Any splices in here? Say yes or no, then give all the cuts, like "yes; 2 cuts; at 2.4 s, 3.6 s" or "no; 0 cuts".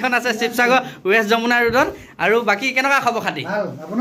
no; 0 cuts